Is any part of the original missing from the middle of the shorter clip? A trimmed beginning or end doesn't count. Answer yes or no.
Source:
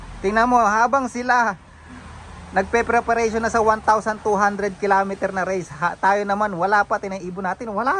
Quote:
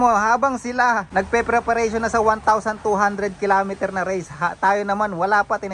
yes